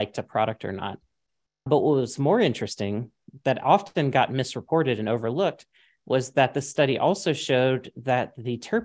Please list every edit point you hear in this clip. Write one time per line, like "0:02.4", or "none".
0:01.7